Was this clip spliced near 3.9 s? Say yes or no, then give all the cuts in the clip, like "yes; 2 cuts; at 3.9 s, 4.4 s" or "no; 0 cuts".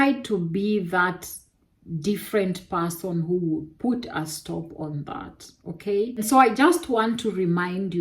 no; 1 cut; at 6.1 s